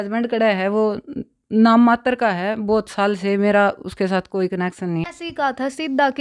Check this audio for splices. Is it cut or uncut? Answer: cut